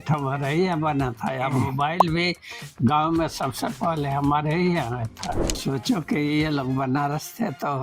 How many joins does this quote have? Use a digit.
1